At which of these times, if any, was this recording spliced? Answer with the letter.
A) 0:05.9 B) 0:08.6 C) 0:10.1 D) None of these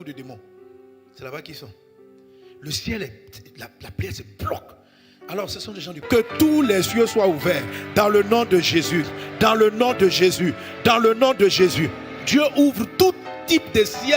A